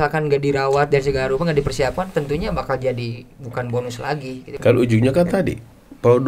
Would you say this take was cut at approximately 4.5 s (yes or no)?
yes